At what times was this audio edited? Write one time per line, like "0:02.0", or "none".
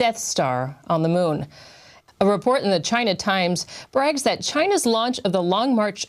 0:04.2